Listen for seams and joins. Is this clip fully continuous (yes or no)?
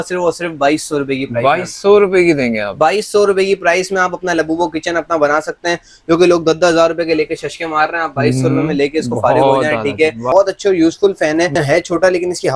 no